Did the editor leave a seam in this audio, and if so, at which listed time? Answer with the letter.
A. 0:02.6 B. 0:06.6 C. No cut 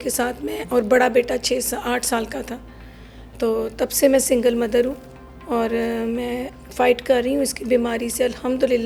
C